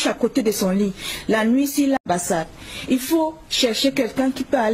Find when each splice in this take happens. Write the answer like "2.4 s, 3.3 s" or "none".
2.0 s